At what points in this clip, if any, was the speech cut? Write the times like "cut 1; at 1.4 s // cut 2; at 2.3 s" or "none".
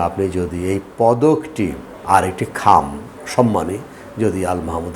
cut 1; at 1.9 s